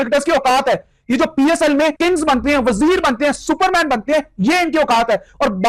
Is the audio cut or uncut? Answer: cut